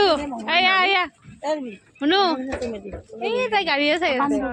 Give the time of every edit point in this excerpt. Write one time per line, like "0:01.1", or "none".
none

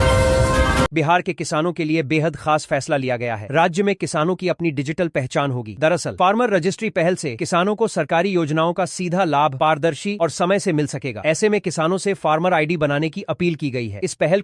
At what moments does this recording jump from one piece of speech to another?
0:00.9

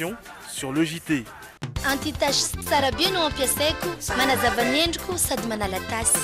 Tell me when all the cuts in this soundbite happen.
0:01.5

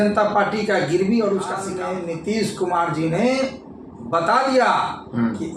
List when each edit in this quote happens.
0:01.7

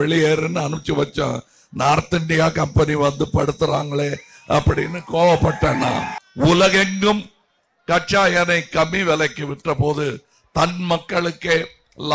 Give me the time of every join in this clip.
0:06.2

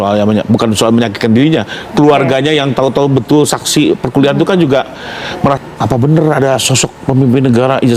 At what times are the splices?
0:05.6

